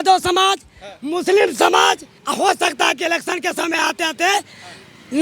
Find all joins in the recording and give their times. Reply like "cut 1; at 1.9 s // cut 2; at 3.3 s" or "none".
cut 1; at 2.1 s